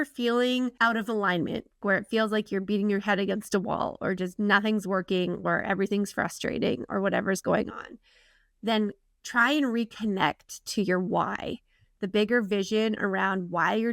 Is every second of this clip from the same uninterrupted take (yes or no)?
no